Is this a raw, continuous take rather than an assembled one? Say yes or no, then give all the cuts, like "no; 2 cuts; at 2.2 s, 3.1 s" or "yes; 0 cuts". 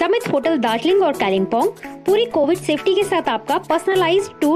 yes; 0 cuts